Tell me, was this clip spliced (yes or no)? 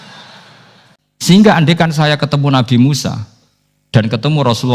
yes